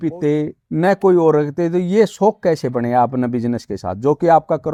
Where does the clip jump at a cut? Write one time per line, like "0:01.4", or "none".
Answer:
none